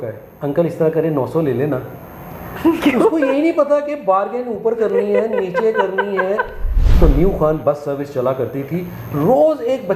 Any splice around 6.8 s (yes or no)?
yes